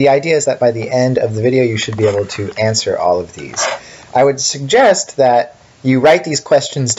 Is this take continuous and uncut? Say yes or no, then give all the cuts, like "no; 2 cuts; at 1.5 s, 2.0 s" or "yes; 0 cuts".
yes; 0 cuts